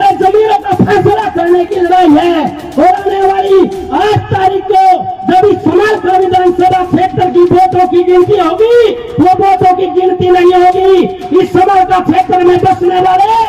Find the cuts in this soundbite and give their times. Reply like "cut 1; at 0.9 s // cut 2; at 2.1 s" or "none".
none